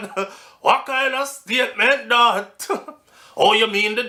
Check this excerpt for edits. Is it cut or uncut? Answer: uncut